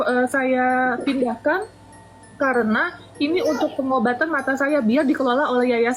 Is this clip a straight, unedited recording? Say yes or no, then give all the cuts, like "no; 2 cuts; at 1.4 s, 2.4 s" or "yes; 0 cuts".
yes; 0 cuts